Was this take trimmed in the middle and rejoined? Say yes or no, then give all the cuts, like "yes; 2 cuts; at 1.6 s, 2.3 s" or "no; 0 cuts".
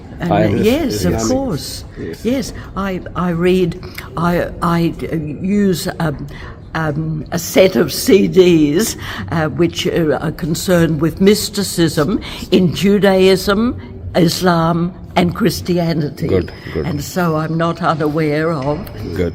no; 0 cuts